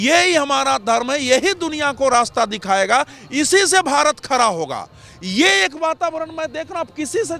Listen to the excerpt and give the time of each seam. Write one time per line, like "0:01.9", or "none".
none